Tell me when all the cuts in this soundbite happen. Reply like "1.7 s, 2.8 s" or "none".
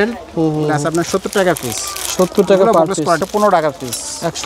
3.2 s